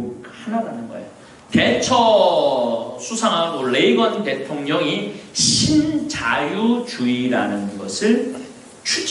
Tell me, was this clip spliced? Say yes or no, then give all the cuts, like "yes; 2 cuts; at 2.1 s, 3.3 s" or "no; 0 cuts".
yes; 1 cut; at 1.3 s